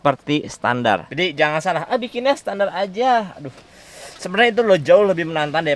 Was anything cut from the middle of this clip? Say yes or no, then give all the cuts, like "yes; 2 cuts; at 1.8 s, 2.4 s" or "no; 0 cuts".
no; 0 cuts